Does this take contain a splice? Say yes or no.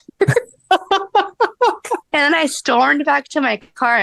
yes